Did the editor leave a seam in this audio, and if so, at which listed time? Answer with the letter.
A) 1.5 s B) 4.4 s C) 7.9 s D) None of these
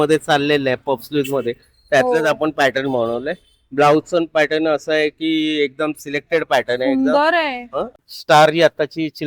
C